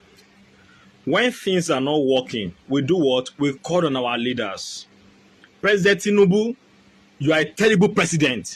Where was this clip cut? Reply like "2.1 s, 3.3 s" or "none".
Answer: none